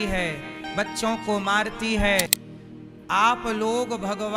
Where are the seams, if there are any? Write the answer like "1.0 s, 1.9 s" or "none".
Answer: 2.4 s